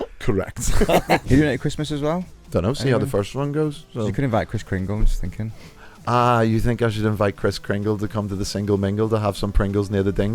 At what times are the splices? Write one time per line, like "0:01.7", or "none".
0:01.2